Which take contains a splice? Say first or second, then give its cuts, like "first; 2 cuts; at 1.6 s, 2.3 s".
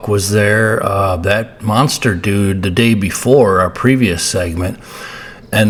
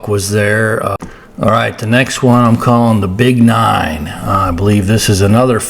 second; 1 cut; at 0.9 s